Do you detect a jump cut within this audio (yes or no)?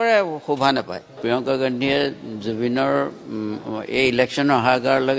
yes